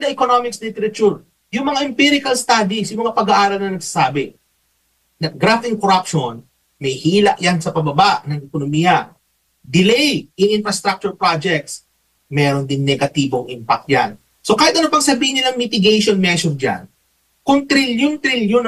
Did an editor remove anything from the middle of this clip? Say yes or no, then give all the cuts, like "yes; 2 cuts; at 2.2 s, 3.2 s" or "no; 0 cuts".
no; 0 cuts